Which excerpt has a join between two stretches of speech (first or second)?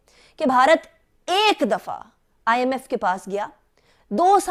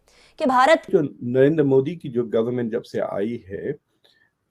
second